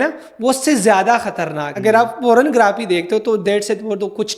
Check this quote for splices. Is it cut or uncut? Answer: cut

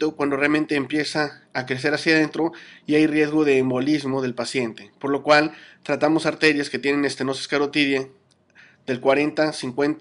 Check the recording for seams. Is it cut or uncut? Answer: uncut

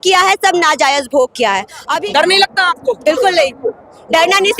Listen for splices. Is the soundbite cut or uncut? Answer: cut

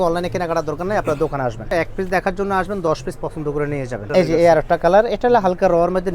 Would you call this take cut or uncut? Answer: cut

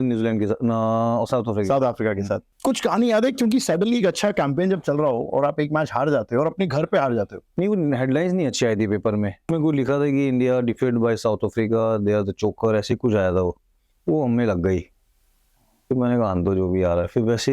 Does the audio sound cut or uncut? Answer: cut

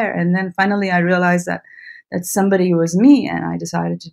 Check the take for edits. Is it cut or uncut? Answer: uncut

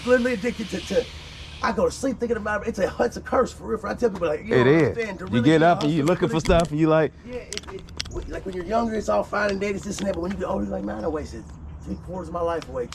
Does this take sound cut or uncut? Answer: uncut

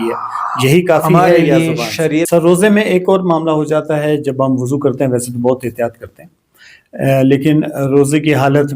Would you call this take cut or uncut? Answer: cut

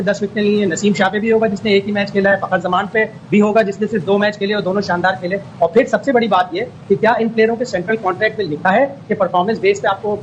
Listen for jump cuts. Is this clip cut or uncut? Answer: uncut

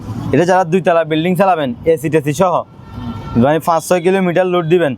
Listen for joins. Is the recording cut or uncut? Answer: uncut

